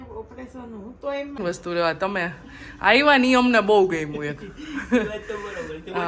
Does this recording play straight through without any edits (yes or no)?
no